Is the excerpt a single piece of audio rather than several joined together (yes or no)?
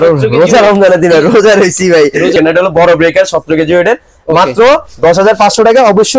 no